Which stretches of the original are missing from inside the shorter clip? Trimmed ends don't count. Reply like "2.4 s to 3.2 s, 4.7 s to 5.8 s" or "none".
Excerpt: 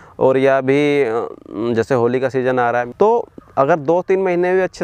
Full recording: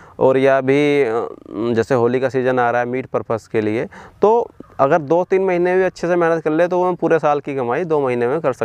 2.9 s to 4.1 s